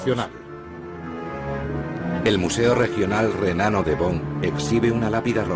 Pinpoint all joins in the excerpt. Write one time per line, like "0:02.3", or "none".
none